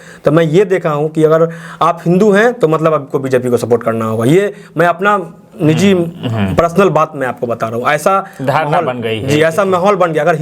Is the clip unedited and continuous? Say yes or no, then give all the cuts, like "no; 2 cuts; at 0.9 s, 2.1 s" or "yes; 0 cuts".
yes; 0 cuts